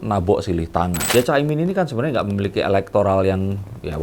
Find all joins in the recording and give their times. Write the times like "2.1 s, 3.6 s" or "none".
1.0 s